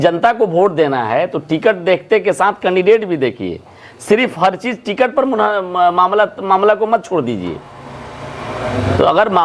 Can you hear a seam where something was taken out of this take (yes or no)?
no